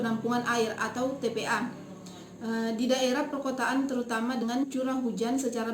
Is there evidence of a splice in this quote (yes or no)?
yes